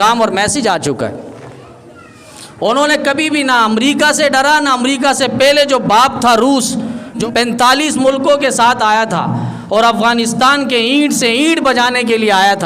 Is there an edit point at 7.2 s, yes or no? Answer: yes